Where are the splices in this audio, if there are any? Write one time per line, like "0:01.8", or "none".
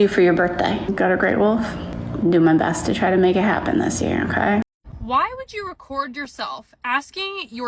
0:00.9
0:04.9